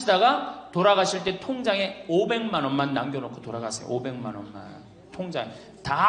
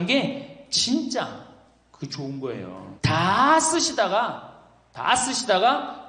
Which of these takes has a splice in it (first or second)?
second